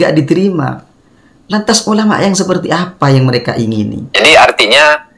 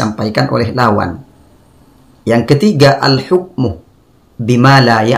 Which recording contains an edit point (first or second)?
first